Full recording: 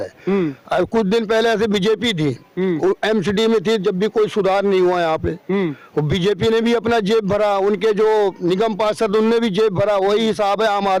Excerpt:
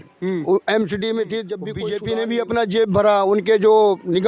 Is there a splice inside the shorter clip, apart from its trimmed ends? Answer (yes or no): yes